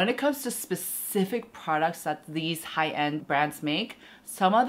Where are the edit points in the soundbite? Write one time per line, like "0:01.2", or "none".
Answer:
0:03.2